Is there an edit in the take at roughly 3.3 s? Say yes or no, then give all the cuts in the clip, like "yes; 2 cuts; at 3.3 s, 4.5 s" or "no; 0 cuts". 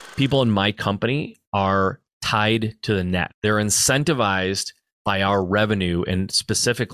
yes; 2 cuts; at 1.4 s, 3.3 s